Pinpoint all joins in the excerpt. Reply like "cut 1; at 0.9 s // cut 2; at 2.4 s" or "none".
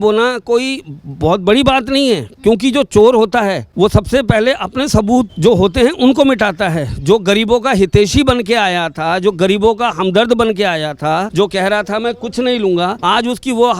cut 1; at 3.6 s // cut 2; at 5.3 s // cut 3; at 11.3 s // cut 4; at 13.0 s